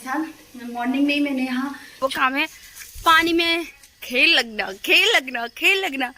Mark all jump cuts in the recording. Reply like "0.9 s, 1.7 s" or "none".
2.0 s